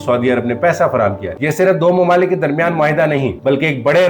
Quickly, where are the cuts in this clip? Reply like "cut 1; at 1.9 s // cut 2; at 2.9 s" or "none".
cut 1; at 1.3 s